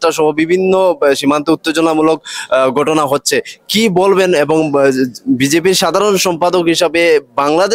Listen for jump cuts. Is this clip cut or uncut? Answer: uncut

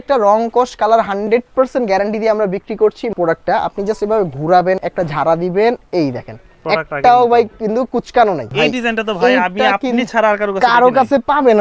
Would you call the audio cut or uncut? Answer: cut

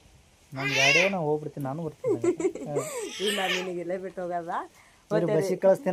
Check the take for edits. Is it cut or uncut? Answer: uncut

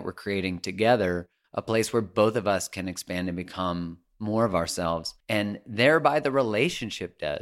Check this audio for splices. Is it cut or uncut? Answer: cut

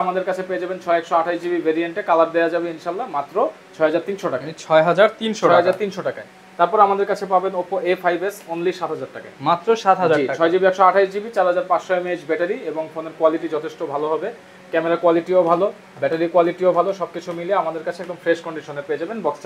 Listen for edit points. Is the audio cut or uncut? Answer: uncut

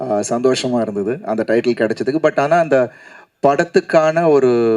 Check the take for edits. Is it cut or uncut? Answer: uncut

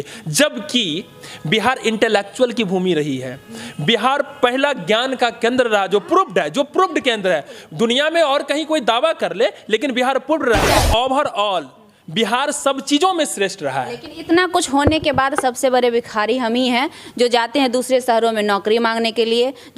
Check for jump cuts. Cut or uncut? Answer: cut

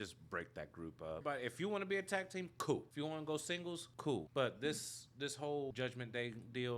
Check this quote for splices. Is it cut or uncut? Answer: cut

